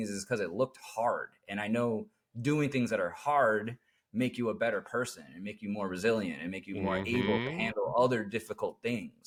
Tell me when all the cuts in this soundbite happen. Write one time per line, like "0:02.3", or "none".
none